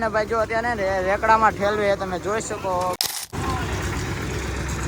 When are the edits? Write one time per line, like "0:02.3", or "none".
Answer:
0:03.0